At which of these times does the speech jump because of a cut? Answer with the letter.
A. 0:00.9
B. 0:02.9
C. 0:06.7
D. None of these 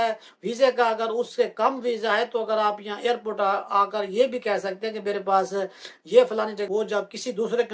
C